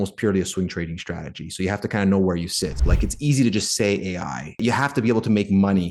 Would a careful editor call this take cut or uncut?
cut